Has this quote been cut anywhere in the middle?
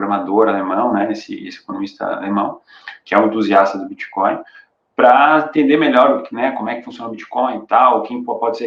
no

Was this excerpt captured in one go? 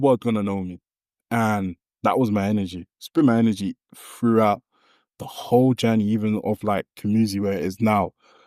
yes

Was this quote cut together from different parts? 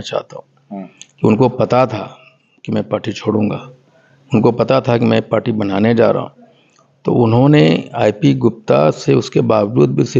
no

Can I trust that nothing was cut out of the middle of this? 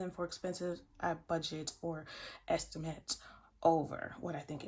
yes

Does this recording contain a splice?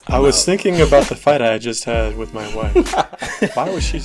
no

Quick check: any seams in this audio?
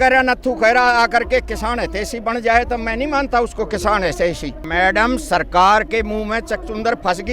yes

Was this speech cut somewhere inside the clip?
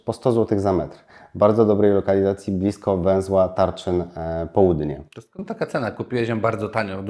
no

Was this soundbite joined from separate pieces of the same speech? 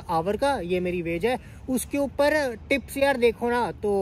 no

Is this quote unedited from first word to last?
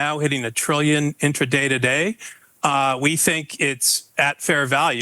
yes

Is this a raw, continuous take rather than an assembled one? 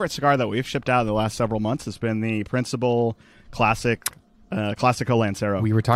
yes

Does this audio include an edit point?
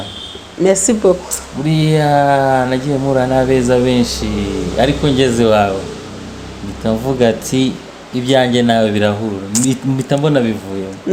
no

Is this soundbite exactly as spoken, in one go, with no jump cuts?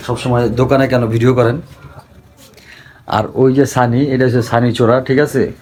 yes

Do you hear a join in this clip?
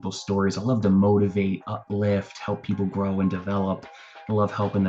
no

